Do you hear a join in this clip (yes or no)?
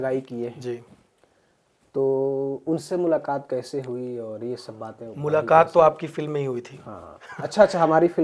no